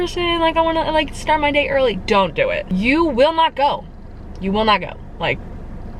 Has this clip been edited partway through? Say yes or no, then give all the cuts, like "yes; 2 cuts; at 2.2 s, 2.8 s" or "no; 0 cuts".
no; 0 cuts